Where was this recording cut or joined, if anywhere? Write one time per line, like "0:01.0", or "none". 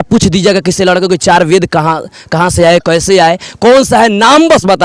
none